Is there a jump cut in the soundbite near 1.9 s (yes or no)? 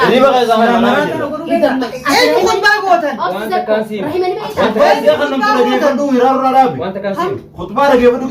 yes